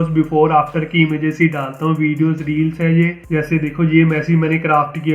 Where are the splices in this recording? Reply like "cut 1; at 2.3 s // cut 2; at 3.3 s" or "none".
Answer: cut 1; at 3.2 s